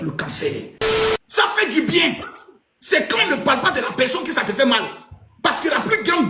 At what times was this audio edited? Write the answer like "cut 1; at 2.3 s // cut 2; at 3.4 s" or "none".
cut 1; at 0.9 s